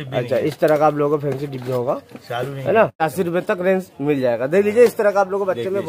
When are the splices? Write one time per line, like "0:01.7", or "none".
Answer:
0:03.0